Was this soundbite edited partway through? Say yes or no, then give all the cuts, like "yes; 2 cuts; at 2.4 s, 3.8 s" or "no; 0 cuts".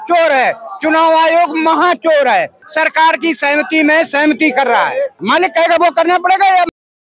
yes; 2 cuts; at 2.6 s, 5.2 s